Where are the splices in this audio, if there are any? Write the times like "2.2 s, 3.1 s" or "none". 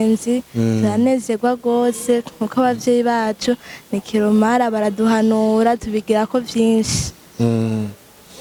none